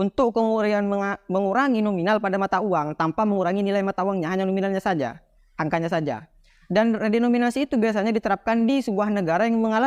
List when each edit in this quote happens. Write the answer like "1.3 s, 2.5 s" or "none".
none